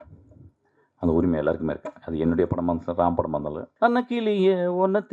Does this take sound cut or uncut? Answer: cut